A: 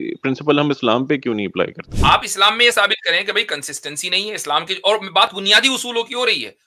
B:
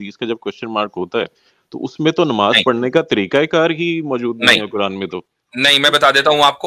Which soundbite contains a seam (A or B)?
A